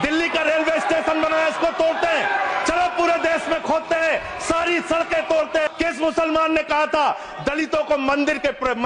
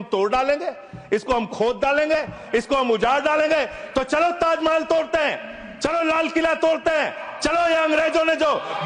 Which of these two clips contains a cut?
first; 1 cut; at 5.7 s

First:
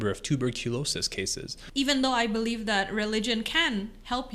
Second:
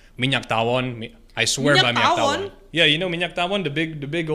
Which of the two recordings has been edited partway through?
first; 1 cut; at 1.5 s

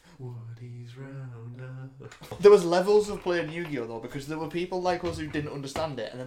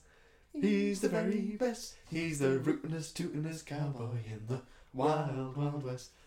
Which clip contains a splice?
first; 1 cut; at 2.2 s

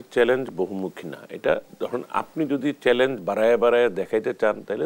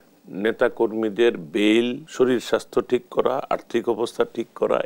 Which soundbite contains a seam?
second; 1 cut; at 2.0 s

